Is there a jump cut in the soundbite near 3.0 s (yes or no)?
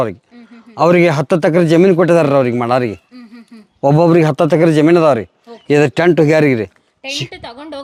no